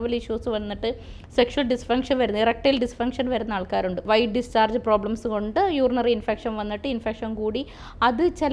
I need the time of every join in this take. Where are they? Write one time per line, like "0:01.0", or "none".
0:04.0